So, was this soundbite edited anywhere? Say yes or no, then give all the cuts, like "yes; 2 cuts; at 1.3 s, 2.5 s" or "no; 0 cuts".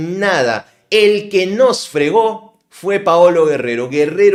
no; 0 cuts